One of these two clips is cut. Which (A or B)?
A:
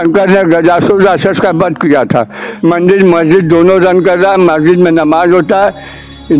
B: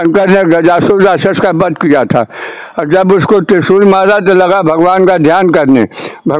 A